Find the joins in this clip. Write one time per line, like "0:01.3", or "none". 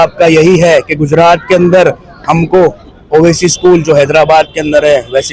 none